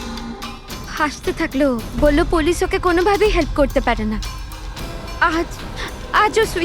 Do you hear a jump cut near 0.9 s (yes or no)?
yes